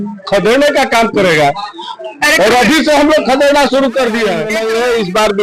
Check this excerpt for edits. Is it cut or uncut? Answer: cut